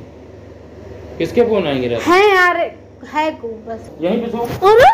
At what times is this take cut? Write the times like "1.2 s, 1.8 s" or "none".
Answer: 3.9 s